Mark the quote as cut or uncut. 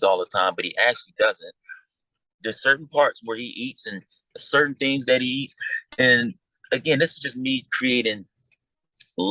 uncut